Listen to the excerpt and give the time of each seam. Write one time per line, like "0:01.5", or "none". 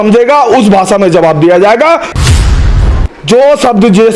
0:02.6